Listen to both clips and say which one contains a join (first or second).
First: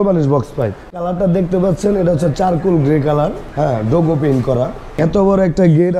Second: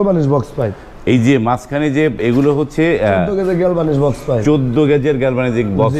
first